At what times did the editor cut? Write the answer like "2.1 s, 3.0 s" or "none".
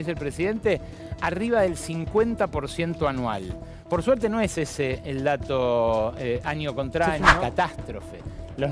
7.2 s